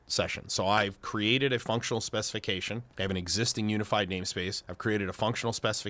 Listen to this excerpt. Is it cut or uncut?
cut